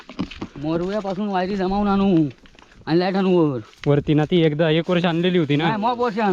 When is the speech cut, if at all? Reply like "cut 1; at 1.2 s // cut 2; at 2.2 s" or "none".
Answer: none

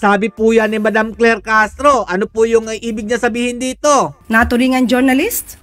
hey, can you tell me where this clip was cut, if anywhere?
none

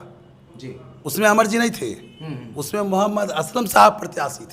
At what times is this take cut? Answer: none

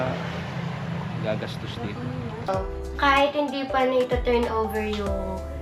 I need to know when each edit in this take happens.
cut 1; at 2.5 s

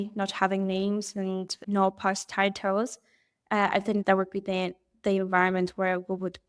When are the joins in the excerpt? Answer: cut 1; at 1.6 s // cut 2; at 4.0 s

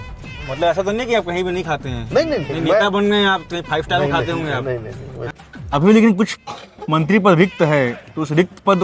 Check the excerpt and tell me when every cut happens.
cut 1; at 5.3 s

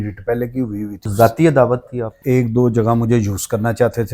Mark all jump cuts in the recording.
cut 1; at 1.0 s // cut 2; at 2.2 s

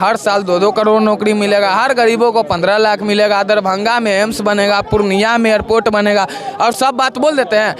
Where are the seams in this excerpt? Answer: none

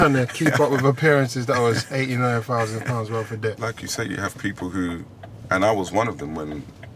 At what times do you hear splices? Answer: cut 1; at 3.6 s

